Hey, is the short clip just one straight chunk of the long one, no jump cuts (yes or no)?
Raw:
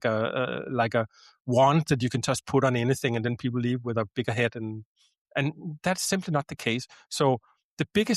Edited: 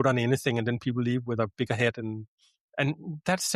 yes